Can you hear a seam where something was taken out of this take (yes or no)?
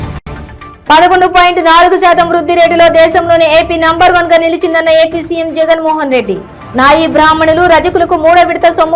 no